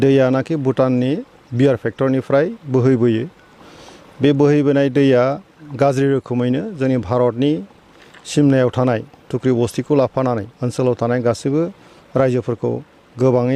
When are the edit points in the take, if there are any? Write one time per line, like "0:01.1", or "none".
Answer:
none